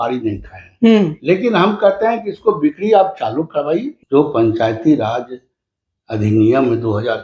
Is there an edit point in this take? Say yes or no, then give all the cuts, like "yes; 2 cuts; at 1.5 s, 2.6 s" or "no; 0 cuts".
yes; 1 cut; at 3.9 s